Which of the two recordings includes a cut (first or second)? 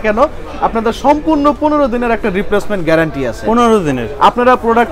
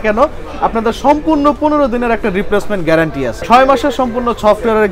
second